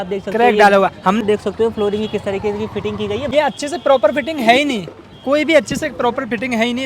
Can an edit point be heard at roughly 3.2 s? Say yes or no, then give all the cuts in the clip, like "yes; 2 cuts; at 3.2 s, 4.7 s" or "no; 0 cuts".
yes; 2 cuts; at 1.2 s, 3.2 s